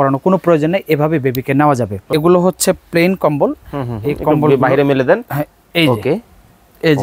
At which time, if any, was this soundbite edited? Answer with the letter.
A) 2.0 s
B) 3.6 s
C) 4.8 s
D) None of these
A